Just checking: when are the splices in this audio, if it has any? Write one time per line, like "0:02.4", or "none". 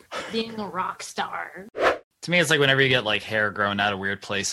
0:01.9

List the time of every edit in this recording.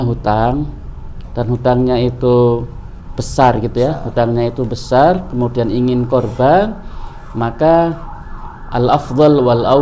none

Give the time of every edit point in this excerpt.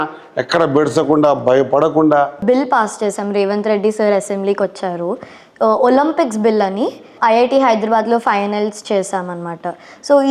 0:02.4
0:07.1

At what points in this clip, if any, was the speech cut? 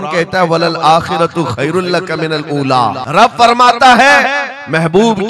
0:03.0

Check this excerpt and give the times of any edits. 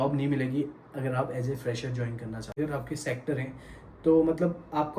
0:02.6

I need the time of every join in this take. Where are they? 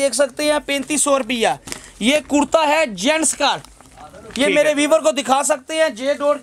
none

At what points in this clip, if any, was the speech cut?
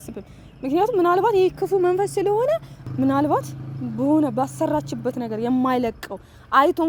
none

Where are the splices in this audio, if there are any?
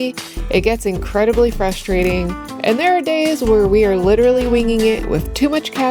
0:02.4

